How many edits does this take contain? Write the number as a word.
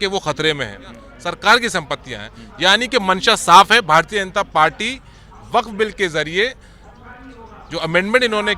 one